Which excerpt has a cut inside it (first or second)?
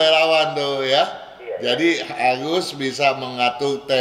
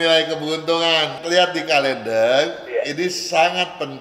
second